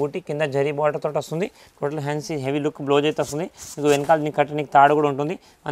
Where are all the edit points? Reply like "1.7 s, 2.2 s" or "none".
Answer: none